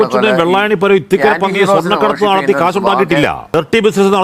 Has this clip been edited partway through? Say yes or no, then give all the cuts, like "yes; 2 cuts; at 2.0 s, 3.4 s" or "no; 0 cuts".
no; 0 cuts